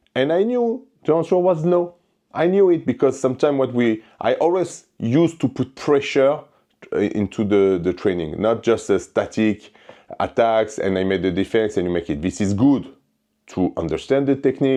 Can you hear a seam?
no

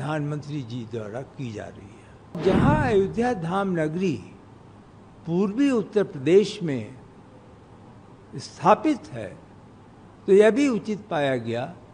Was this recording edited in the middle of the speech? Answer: yes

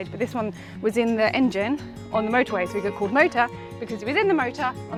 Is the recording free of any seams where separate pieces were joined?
yes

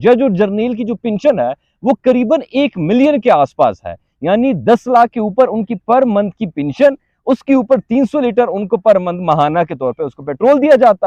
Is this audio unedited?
yes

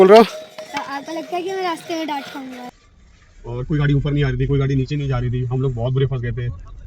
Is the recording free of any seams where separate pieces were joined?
no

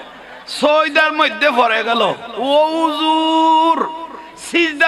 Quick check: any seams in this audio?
no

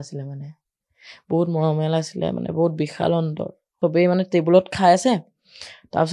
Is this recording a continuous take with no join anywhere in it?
no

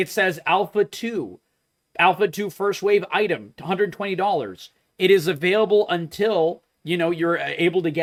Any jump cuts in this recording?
no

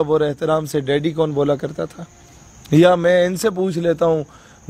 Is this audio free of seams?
yes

